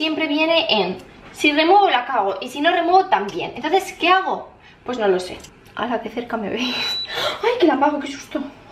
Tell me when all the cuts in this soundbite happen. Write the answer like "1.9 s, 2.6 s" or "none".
none

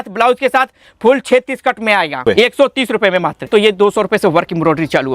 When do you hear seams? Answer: 2.2 s, 3.5 s

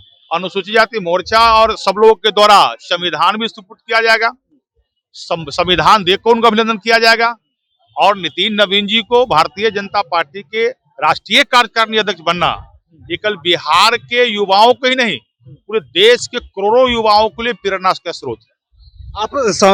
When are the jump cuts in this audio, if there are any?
none

